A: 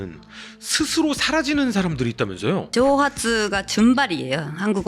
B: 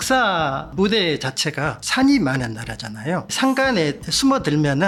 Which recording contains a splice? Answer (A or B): A